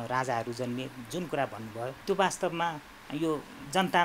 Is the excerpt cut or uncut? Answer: cut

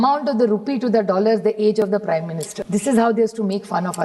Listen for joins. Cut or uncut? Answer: cut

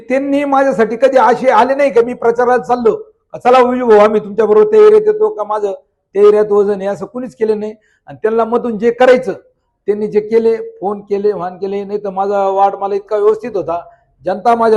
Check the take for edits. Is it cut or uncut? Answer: uncut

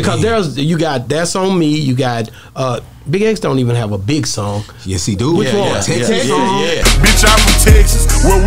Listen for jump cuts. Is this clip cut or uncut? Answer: uncut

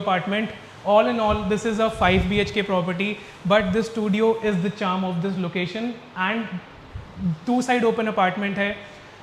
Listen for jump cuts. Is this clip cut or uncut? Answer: uncut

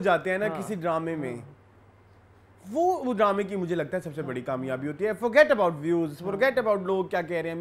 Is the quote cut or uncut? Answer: uncut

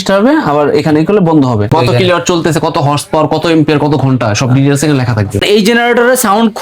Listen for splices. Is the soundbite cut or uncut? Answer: cut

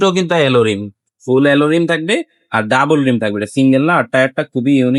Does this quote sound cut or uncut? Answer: uncut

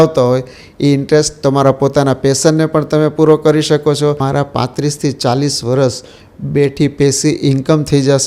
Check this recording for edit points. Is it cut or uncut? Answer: cut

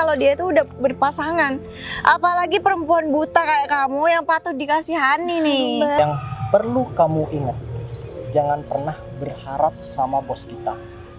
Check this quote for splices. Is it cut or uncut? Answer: cut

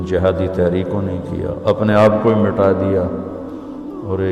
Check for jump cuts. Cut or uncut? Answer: uncut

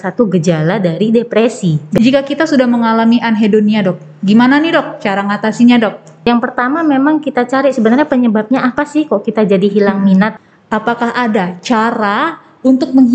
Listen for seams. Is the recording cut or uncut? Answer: cut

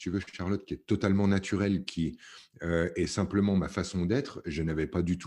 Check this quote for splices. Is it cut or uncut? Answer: uncut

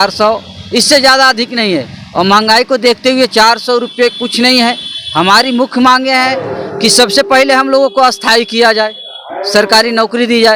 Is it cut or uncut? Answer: uncut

